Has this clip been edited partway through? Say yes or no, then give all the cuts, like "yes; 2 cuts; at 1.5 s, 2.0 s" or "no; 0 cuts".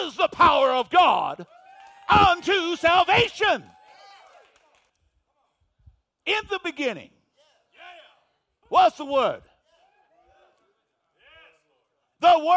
yes; 1 cut; at 4.9 s